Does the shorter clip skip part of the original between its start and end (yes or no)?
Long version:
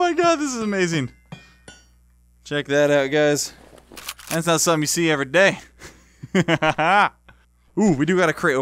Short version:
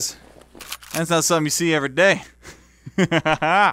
no